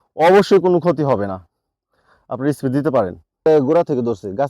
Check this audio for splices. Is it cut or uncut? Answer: cut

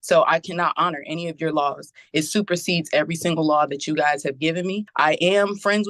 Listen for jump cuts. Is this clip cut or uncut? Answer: cut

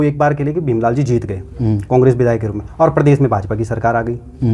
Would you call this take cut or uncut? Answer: uncut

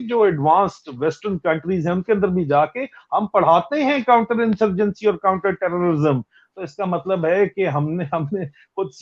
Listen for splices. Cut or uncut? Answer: uncut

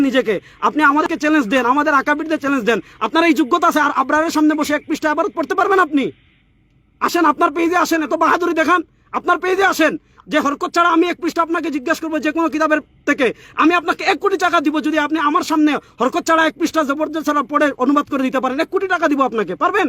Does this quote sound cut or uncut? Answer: cut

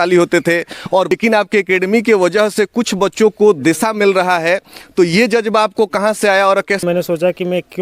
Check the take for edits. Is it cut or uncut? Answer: cut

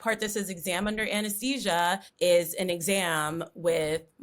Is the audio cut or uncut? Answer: cut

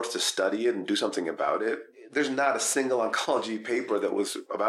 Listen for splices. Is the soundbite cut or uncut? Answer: cut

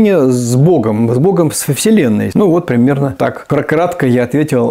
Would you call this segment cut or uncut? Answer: cut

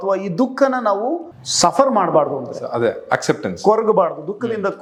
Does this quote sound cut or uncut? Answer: uncut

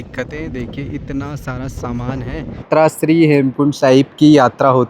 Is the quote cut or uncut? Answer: cut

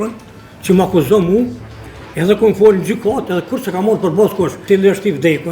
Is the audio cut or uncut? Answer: cut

